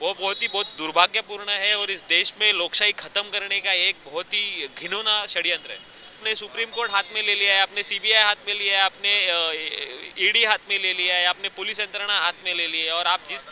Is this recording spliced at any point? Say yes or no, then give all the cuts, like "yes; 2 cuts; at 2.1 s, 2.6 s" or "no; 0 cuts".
yes; 1 cut; at 6.2 s